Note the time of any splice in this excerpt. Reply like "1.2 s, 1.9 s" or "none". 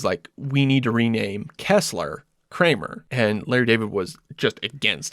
3.0 s